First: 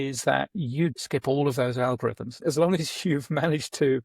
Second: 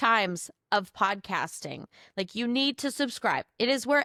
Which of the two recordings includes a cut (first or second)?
first